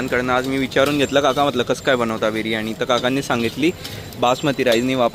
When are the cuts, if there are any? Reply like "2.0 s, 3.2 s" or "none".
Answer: none